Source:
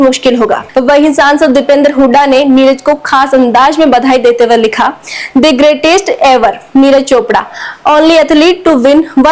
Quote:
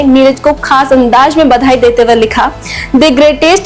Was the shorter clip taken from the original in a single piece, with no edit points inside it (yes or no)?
yes